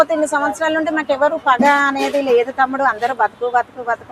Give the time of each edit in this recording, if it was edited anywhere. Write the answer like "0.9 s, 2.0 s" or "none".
none

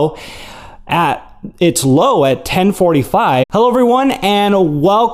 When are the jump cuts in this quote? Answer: none

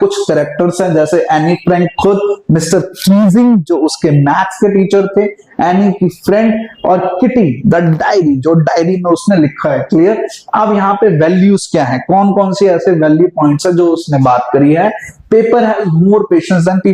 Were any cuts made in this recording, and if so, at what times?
none

